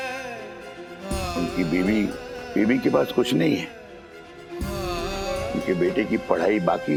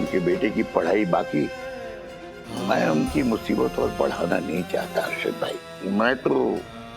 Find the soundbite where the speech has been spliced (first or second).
second